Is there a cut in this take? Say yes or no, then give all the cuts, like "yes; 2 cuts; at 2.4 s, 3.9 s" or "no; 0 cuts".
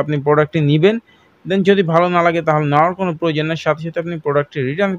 no; 0 cuts